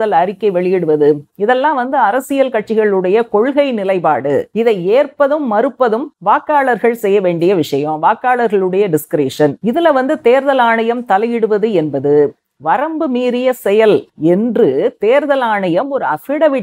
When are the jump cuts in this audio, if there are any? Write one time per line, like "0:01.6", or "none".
none